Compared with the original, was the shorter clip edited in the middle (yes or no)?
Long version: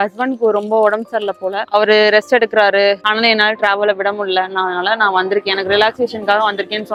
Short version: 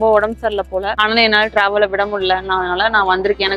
yes